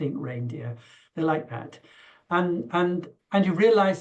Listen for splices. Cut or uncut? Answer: uncut